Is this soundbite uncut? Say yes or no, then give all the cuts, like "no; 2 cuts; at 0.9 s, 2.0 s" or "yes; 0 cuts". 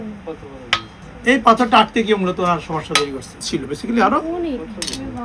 no; 2 cuts; at 1.1 s, 3.5 s